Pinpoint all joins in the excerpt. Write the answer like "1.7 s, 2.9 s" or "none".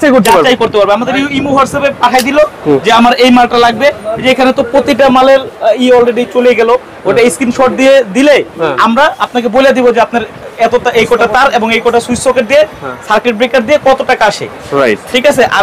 none